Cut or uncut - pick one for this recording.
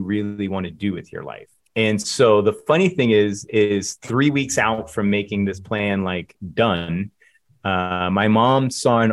uncut